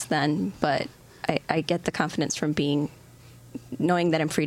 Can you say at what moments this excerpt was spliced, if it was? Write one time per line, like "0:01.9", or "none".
none